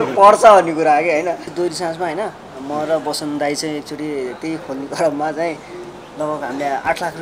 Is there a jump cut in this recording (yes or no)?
yes